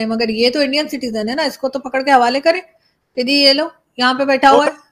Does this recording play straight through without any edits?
yes; 0 cuts

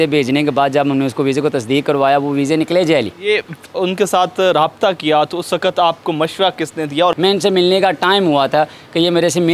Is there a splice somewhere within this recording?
yes; 2 cuts; at 3.1 s, 7.1 s

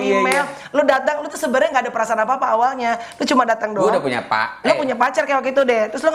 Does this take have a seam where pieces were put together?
no; 0 cuts

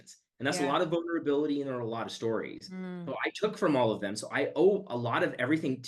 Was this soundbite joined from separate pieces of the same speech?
no; 0 cuts

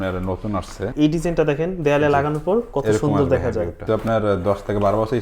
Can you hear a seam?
yes; 2 cuts; at 0.9 s, 3.8 s

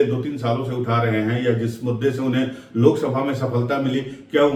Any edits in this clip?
no; 0 cuts

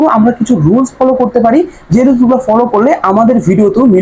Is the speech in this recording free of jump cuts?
yes; 0 cuts

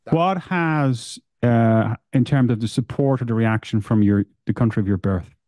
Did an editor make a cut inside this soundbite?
no; 0 cuts

